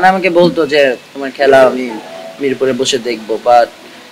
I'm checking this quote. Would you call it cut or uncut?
uncut